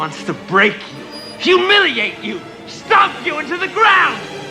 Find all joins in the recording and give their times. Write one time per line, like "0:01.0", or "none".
none